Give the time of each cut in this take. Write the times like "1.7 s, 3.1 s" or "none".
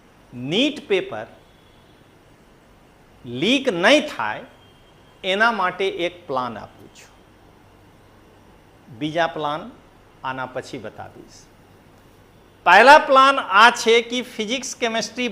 none